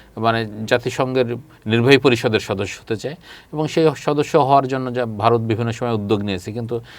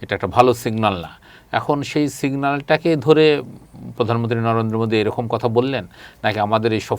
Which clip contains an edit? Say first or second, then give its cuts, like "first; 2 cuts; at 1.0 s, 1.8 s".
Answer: first; 1 cut; at 1.5 s